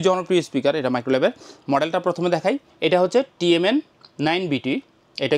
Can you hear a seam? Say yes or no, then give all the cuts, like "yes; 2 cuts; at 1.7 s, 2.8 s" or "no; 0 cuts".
no; 0 cuts